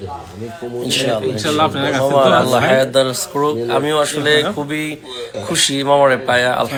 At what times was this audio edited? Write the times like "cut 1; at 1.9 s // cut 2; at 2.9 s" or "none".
none